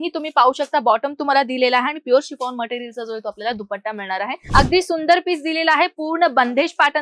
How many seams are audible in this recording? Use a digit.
1